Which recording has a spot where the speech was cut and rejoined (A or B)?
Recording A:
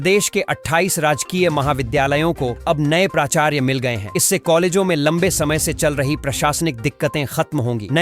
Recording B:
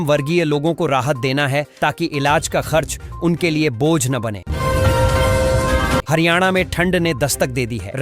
B